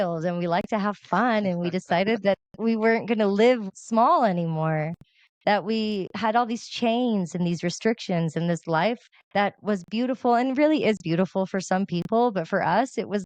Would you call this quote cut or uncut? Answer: cut